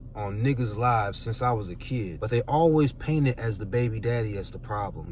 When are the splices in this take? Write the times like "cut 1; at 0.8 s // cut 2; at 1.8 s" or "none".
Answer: cut 1; at 2.2 s

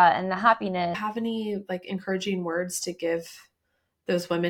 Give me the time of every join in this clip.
cut 1; at 1.0 s

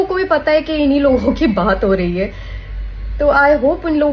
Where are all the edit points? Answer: none

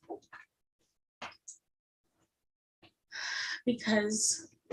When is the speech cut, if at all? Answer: none

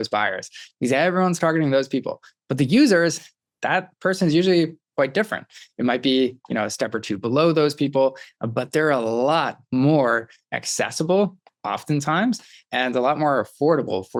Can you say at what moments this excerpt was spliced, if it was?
none

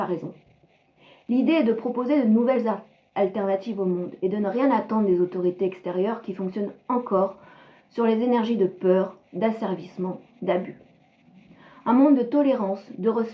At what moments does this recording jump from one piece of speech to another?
none

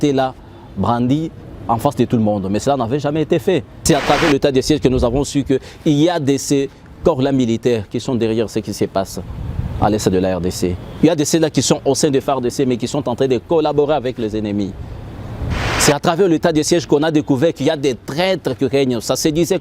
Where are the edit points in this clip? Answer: cut 1; at 3.7 s

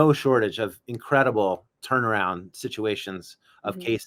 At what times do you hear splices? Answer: none

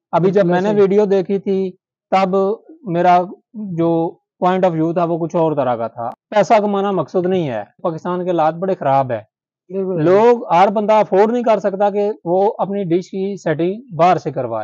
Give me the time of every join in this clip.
cut 1; at 6.1 s // cut 2; at 7.9 s

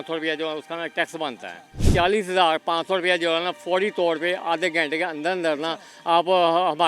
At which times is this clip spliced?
cut 1; at 1.9 s

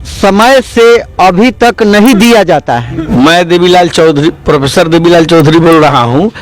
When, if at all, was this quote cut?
cut 1; at 3.0 s

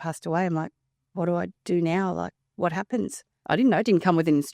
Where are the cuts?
cut 1; at 3.3 s

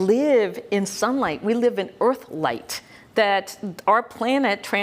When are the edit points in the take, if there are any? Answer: none

